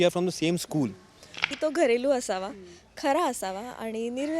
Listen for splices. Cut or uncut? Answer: cut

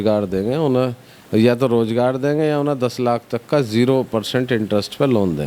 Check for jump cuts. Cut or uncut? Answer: uncut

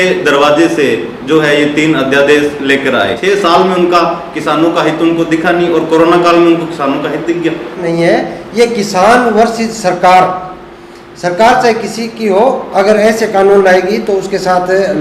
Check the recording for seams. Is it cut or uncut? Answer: cut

